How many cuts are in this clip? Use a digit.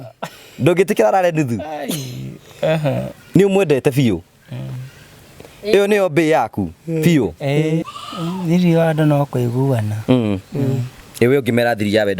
1